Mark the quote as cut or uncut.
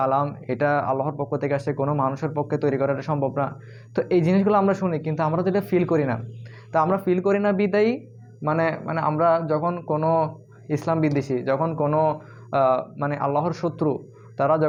uncut